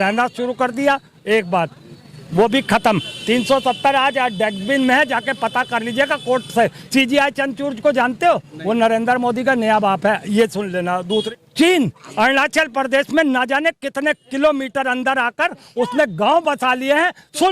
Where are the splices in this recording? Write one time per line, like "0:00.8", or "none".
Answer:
0:11.3